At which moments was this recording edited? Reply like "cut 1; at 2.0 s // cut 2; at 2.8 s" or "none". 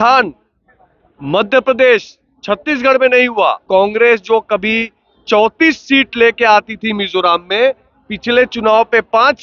cut 1; at 3.6 s